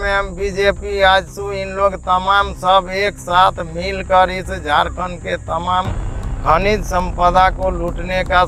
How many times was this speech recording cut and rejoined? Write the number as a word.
zero